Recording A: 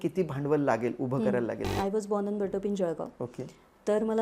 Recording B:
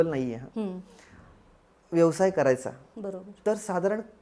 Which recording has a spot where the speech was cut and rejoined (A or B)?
A